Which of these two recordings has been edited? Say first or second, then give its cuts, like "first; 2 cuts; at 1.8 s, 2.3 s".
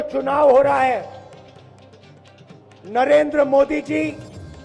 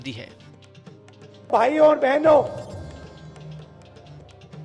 first; 2 cuts; at 1.5 s, 2.8 s